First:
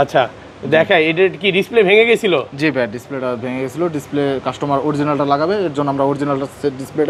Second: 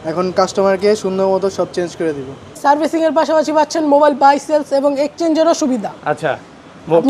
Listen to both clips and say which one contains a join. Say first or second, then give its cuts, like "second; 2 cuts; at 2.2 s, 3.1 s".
second; 1 cut; at 2.5 s